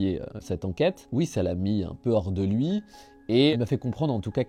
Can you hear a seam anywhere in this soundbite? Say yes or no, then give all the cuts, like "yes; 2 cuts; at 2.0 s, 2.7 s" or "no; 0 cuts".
yes; 2 cuts; at 0.9 s, 3.5 s